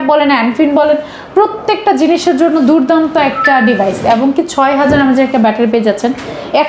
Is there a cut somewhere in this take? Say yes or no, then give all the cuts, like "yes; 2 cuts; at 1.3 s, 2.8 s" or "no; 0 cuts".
no; 0 cuts